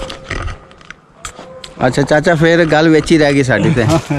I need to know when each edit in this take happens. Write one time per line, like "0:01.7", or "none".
none

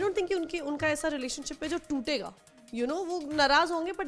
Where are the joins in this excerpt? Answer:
none

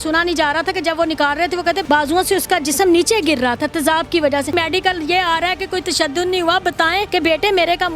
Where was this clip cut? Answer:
0:01.8
0:04.5
0:07.1

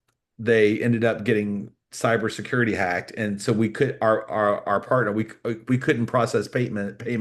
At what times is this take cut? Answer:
none

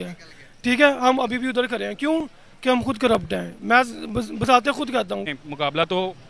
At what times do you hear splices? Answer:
0:05.3

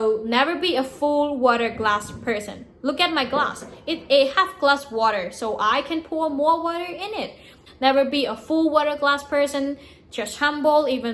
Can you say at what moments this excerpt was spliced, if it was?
0:07.6

